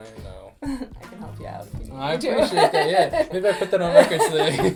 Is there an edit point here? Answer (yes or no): no